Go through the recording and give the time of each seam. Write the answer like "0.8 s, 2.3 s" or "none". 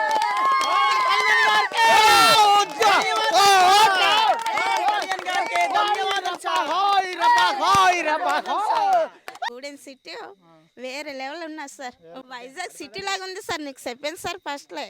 9.3 s, 12.3 s

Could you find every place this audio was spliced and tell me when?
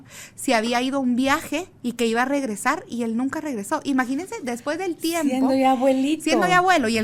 none

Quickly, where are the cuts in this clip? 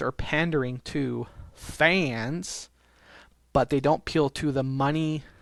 none

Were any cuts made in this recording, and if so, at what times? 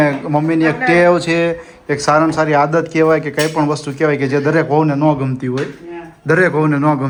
none

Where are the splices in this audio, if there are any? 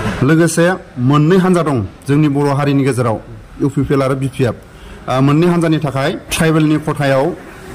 6.2 s

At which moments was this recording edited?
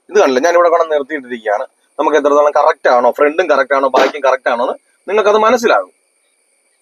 none

